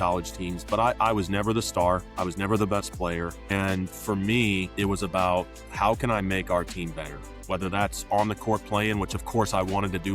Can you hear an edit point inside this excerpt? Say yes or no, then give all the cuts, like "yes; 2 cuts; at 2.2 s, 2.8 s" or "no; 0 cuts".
yes; 3 cuts; at 2.1 s, 3.4 s, 4.7 s